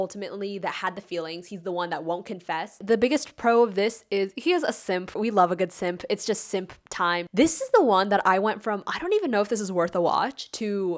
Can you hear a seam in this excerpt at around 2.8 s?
yes; 2 cuts; at 2.8 s, 7.3 s

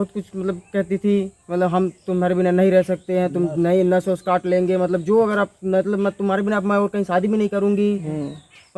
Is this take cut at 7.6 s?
no; 0 cuts

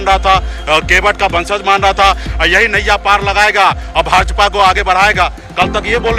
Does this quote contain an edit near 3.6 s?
no; 1 cut; at 2.3 s

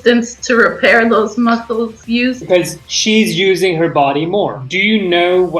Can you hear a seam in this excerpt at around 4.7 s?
yes; 2 cuts; at 2.7 s, 4.7 s

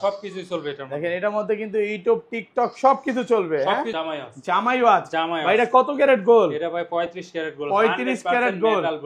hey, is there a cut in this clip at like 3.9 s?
yes; 1 cut; at 3.9 s

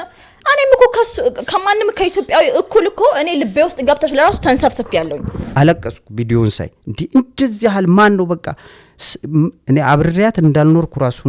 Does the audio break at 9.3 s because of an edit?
no; 1 cut; at 5.4 s

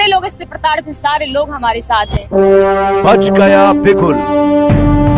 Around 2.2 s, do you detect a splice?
yes; 1 cut; at 2.2 s

